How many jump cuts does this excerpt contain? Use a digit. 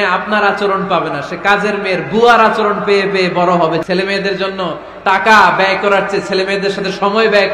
1